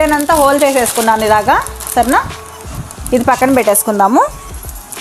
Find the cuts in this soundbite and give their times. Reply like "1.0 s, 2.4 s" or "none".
none